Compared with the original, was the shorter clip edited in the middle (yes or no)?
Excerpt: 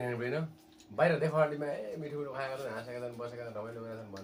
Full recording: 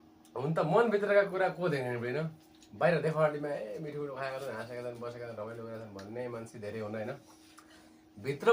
no